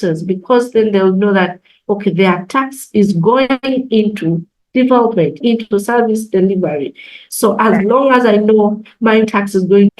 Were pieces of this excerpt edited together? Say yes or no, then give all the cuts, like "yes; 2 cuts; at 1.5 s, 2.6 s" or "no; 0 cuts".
yes; 2 cuts; at 5.4 s, 9.2 s